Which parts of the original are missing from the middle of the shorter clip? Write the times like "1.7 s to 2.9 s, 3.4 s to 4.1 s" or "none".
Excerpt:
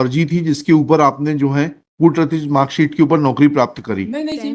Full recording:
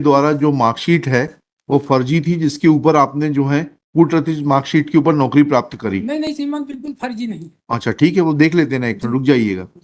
none